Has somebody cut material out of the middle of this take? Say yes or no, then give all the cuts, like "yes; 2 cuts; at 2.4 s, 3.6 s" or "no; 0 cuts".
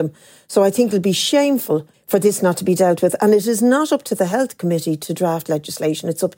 yes; 1 cut; at 1.9 s